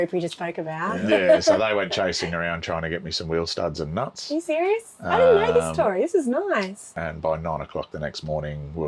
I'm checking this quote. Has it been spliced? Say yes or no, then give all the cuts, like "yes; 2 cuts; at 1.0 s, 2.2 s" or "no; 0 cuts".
yes; 2 cuts; at 1.0 s, 7.0 s